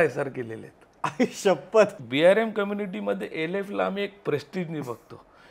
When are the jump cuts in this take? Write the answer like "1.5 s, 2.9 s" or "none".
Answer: 2.0 s